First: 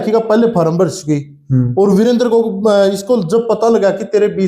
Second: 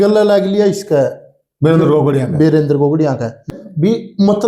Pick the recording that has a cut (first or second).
second